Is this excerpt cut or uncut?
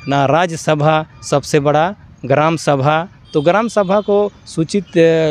uncut